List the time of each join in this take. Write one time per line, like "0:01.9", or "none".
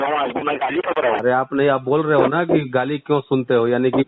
0:01.2